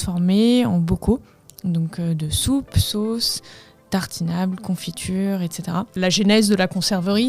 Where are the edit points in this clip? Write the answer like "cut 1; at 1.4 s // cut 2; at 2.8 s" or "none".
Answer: cut 1; at 5.9 s

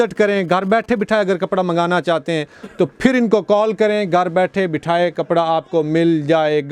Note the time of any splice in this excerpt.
none

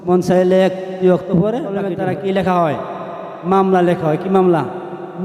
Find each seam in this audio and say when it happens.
cut 1; at 1.9 s

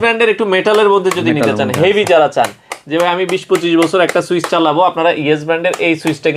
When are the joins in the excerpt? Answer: none

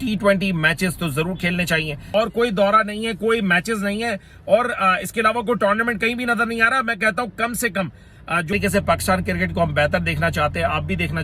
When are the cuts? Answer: cut 1; at 2.1 s // cut 2; at 8.5 s

